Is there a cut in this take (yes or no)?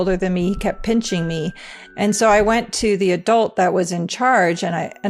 no